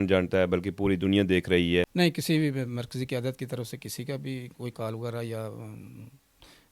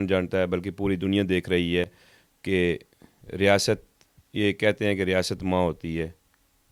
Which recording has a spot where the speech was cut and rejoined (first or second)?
first